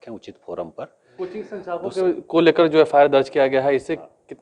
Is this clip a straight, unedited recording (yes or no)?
no